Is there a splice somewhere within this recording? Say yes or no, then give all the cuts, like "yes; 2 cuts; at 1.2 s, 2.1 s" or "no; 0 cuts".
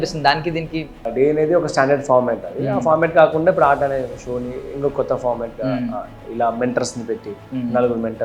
yes; 1 cut; at 1.1 s